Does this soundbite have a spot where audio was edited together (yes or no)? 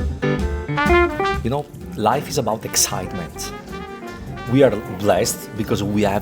yes